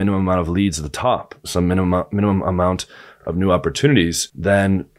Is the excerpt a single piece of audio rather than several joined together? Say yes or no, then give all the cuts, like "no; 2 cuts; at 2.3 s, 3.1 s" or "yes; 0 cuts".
yes; 0 cuts